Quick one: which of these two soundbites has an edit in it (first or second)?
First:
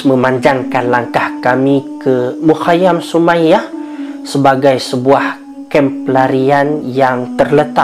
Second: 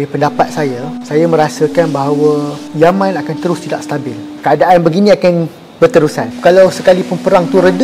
second